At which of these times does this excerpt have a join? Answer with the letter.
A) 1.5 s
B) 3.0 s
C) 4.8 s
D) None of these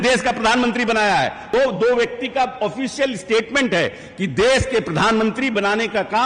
A